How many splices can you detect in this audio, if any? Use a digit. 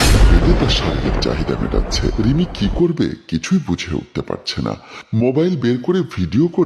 1